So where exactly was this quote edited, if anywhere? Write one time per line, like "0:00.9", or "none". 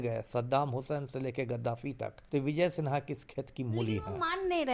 0:02.2